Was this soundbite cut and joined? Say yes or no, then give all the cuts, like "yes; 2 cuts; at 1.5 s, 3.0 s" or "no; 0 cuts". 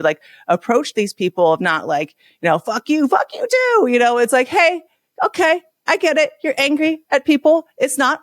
no; 0 cuts